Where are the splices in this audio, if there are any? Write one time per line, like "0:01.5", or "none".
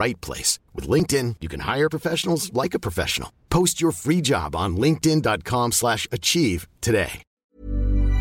0:07.3